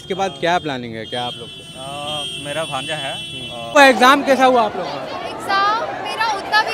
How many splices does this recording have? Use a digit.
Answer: 1